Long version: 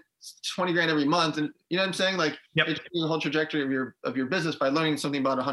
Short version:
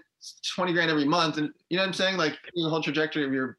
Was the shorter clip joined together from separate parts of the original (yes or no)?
yes